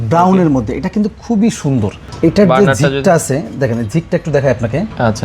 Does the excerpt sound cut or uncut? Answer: cut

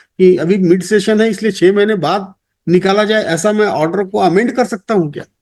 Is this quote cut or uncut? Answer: uncut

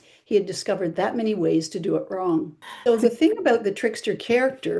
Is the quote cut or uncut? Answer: cut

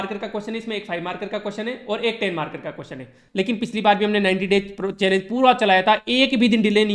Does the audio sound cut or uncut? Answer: cut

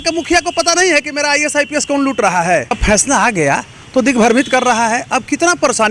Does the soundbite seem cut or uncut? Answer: cut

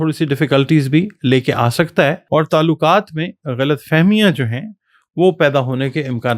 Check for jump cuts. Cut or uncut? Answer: cut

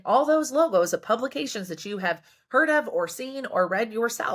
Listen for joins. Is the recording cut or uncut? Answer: uncut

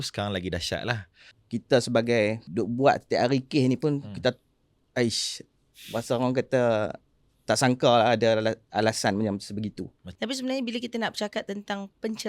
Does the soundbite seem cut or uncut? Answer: cut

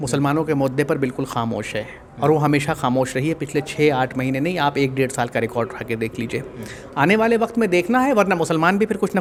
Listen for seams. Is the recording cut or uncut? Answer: uncut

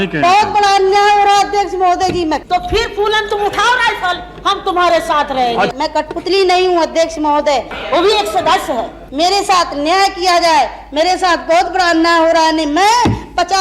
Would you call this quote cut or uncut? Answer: cut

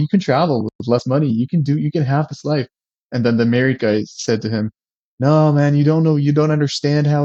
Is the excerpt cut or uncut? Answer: uncut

